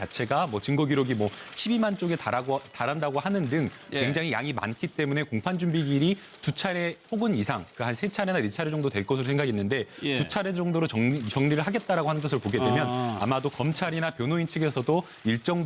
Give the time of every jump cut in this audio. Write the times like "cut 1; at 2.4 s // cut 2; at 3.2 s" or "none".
cut 1; at 7.1 s

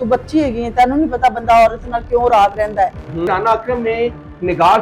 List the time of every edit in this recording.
cut 1; at 3.3 s

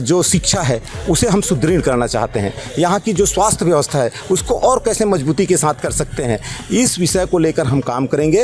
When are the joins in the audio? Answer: none

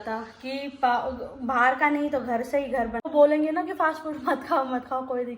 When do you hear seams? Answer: cut 1; at 3.0 s

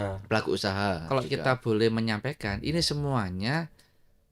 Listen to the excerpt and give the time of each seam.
cut 1; at 1.0 s

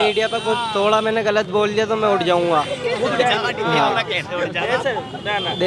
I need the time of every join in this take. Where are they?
none

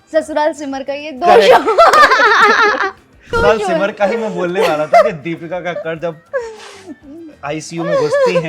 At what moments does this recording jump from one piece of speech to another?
cut 1; at 3.3 s

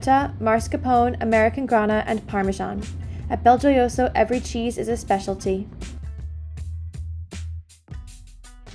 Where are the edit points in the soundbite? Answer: cut 1; at 5.8 s

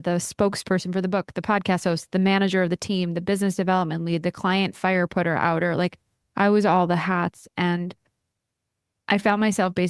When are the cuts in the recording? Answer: none

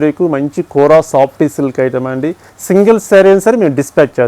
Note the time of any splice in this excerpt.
cut 1; at 2.5 s

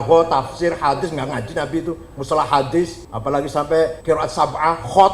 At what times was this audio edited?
cut 1; at 3.1 s // cut 2; at 4.0 s

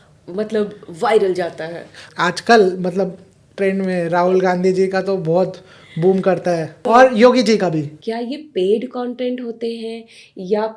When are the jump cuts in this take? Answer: cut 1; at 2.0 s // cut 2; at 6.8 s // cut 3; at 7.9 s

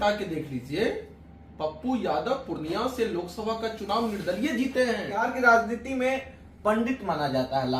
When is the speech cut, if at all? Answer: cut 1; at 5.3 s

